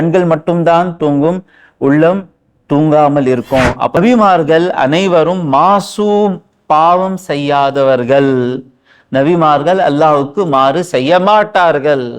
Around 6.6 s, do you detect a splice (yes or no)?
no